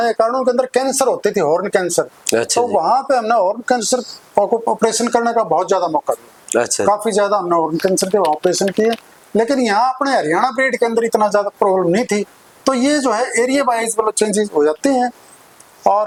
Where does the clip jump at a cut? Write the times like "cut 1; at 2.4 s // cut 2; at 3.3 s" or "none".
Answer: none